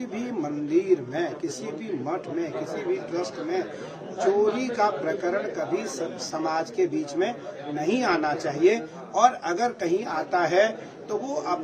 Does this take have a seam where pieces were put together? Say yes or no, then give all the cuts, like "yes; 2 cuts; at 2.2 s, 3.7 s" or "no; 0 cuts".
no; 0 cuts